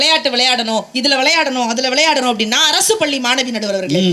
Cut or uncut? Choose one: uncut